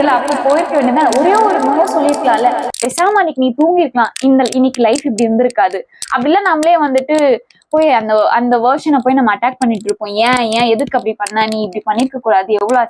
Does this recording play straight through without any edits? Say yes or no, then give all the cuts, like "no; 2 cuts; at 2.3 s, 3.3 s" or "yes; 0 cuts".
yes; 0 cuts